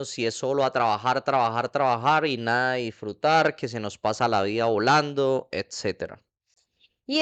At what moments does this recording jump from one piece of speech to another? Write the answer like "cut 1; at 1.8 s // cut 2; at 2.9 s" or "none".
none